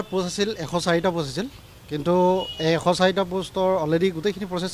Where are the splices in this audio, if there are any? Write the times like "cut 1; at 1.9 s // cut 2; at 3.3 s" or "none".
none